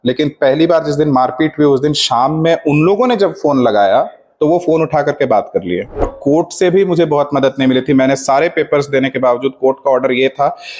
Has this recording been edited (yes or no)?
yes